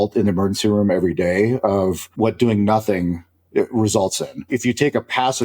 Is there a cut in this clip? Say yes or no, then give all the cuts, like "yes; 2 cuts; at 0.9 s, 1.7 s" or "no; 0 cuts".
yes; 2 cuts; at 2.1 s, 4.5 s